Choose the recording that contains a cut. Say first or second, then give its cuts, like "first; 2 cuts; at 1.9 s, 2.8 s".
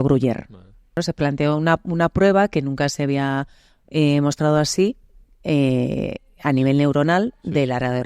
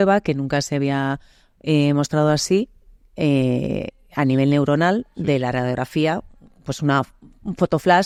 first; 1 cut; at 1.0 s